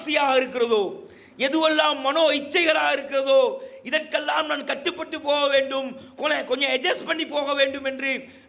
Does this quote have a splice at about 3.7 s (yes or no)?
no